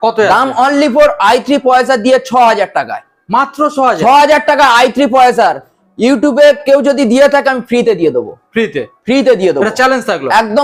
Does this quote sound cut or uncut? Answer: uncut